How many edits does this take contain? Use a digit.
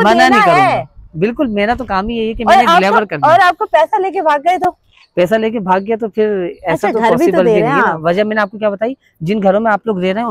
0